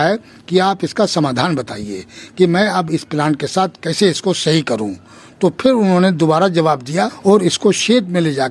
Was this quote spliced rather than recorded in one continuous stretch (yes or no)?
yes